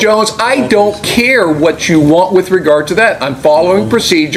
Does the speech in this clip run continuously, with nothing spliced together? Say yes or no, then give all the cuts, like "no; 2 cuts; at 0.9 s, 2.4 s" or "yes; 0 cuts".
yes; 0 cuts